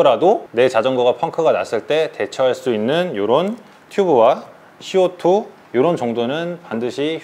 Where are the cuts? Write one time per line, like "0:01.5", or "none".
none